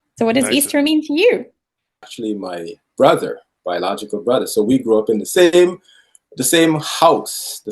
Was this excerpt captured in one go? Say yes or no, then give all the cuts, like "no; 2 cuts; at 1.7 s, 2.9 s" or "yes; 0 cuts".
no; 1 cut; at 2.1 s